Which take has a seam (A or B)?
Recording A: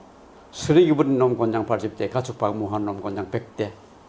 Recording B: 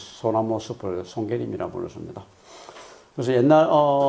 B